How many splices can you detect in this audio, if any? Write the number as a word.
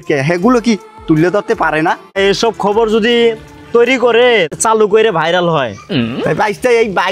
two